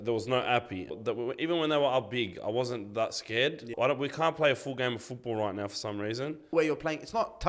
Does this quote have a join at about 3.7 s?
yes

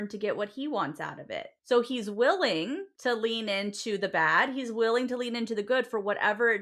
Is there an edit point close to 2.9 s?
yes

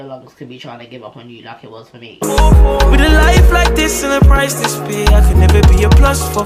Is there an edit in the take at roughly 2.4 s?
yes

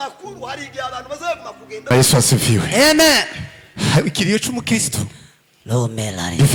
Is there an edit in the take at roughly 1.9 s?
yes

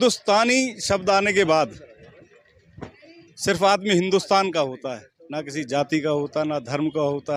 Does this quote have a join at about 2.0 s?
no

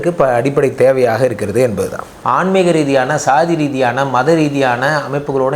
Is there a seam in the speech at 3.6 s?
no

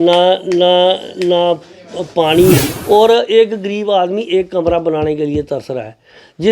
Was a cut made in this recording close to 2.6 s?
yes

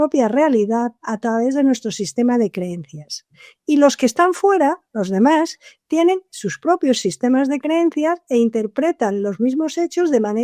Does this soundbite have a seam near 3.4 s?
no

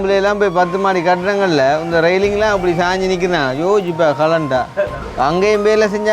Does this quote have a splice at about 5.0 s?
yes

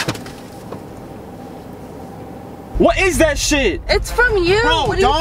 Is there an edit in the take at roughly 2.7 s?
yes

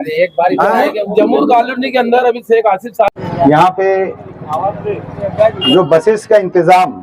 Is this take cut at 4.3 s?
no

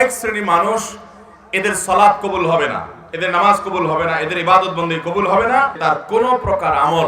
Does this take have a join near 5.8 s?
yes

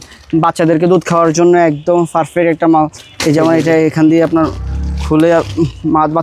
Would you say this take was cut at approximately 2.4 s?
no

